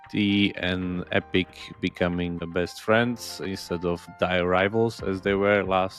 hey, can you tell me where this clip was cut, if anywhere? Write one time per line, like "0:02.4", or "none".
0:02.5
0:04.1